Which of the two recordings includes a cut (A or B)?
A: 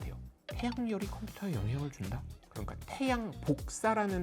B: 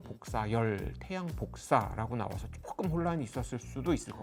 A